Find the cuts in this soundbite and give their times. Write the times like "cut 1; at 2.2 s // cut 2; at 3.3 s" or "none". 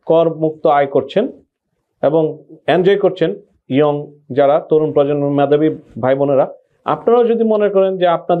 none